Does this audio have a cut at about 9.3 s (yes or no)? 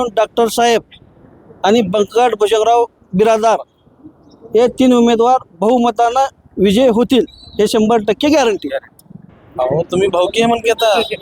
yes